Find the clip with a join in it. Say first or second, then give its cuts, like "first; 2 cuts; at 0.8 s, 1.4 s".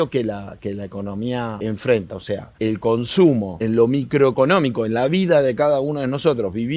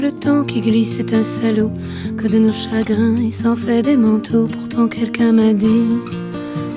first; 3 cuts; at 1.6 s, 2.5 s, 3.6 s